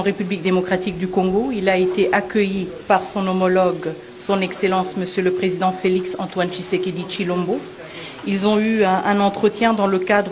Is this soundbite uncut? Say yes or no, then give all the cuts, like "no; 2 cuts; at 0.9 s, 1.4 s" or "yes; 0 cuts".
yes; 0 cuts